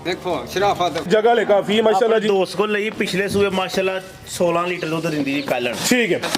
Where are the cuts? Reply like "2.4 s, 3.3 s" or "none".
1.1 s